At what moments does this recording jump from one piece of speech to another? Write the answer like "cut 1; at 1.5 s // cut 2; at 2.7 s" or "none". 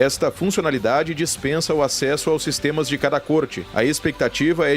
cut 1; at 3.6 s